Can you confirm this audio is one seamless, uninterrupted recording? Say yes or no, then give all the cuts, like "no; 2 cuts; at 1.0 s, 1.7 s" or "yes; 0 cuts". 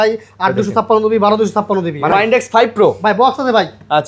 no; 1 cut; at 2.1 s